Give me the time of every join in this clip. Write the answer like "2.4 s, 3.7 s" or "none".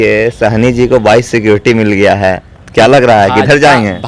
none